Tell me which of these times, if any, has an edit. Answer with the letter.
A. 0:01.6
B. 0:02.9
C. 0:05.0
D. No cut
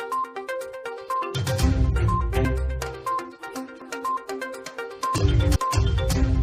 D